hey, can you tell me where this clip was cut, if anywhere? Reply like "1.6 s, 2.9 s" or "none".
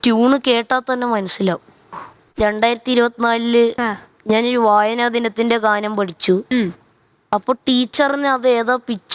2.2 s